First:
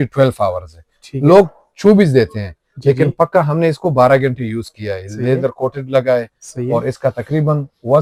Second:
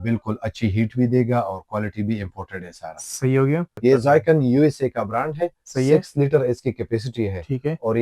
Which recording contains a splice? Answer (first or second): second